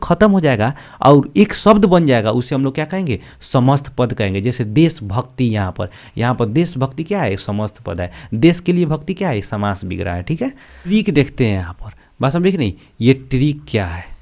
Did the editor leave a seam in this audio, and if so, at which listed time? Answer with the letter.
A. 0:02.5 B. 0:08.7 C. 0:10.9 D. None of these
C